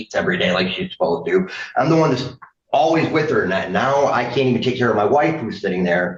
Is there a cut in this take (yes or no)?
no